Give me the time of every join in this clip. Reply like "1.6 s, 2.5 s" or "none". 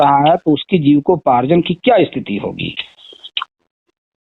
none